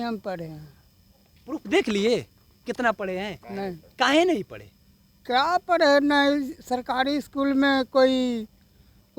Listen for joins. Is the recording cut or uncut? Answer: uncut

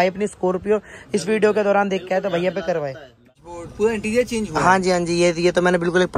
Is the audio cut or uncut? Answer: cut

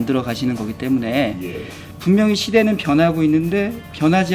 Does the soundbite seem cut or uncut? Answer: uncut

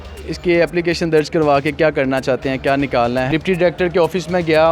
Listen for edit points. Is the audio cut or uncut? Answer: cut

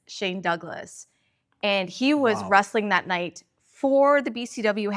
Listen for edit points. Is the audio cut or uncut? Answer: uncut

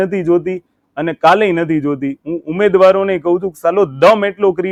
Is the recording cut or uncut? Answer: uncut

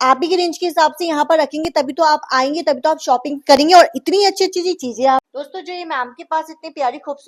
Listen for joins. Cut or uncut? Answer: cut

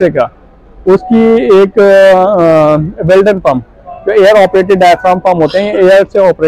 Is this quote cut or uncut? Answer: uncut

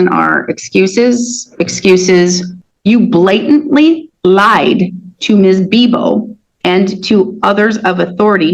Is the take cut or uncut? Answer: cut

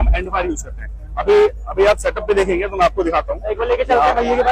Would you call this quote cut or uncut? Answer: uncut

